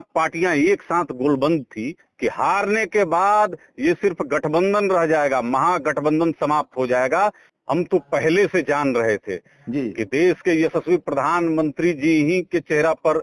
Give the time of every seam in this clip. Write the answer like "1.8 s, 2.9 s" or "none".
2.0 s, 7.5 s